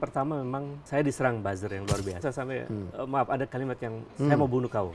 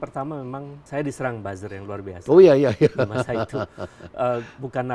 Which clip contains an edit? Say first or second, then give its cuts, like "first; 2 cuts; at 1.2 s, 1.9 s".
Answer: first; 2 cuts; at 2.2 s, 4.0 s